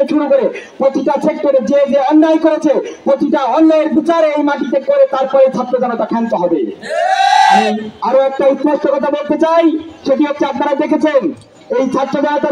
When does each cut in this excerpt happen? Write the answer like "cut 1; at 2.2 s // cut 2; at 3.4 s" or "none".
none